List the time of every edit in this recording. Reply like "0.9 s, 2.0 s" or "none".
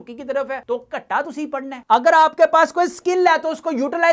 1.7 s